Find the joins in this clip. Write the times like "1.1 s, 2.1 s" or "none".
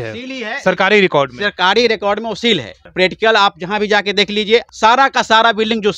2.8 s, 4.7 s